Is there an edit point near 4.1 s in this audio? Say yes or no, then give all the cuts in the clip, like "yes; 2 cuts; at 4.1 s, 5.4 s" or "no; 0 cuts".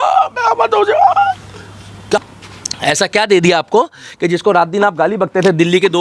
no; 1 cut; at 2.2 s